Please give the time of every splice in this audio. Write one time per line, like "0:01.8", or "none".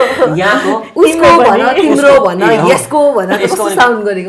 none